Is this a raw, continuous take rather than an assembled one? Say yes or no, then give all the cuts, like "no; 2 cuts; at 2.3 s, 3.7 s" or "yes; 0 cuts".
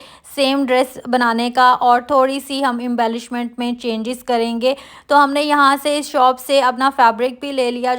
yes; 0 cuts